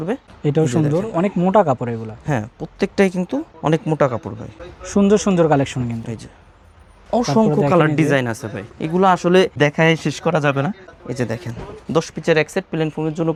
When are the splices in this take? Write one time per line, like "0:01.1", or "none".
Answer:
none